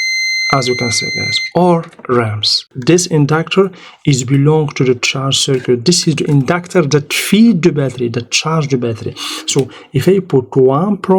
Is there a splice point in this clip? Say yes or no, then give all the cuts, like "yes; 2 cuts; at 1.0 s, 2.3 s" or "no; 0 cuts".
yes; 1 cut; at 2.7 s